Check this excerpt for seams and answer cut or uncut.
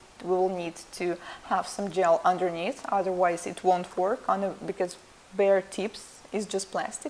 cut